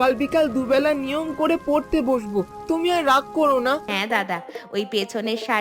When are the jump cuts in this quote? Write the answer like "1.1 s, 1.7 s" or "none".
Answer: 3.9 s